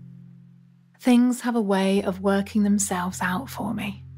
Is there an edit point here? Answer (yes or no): yes